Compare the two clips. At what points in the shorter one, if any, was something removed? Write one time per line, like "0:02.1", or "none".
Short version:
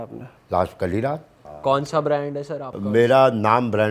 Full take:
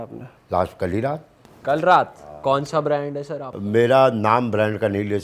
0:01.4